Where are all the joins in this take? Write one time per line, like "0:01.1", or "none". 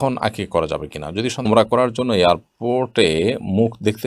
0:01.4